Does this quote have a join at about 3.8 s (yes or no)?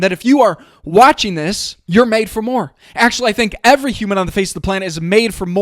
no